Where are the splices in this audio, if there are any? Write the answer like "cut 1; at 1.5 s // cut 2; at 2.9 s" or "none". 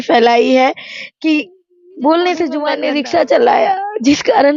cut 1; at 2.8 s